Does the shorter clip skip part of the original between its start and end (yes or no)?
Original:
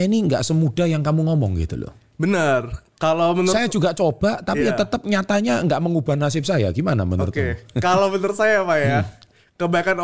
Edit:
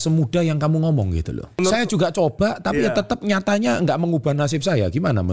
yes